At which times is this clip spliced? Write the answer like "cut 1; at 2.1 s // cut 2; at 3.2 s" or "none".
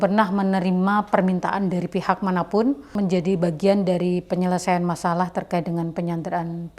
cut 1; at 2.9 s